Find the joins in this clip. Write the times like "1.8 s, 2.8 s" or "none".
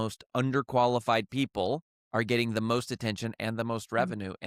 none